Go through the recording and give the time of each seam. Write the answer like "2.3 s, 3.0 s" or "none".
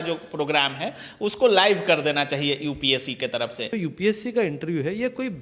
3.8 s